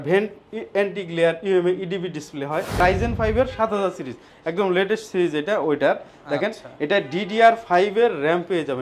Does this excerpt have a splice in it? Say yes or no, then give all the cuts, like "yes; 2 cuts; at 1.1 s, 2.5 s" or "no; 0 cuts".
yes; 1 cut; at 2.8 s